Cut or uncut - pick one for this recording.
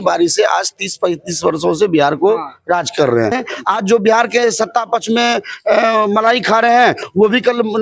cut